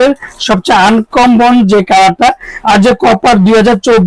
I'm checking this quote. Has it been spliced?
no; 0 cuts

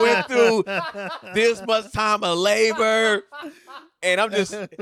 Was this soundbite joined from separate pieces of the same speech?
no; 0 cuts

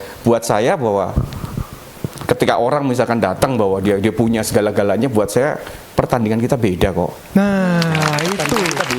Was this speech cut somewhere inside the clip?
no; 0 cuts

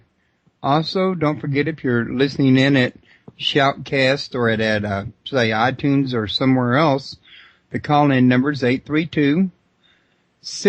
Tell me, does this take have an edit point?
yes; 1 cut; at 7.1 s

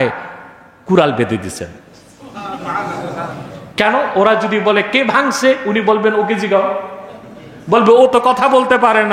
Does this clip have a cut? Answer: no; 0 cuts

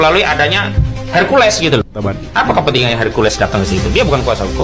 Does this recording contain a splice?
yes; 1 cut; at 2.0 s

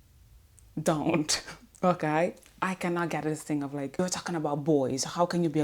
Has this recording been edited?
yes; 1 cut; at 4.0 s

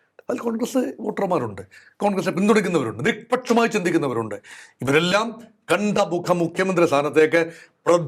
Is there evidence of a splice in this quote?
no; 0 cuts

